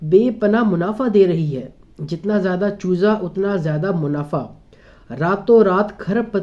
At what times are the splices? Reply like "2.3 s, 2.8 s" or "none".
none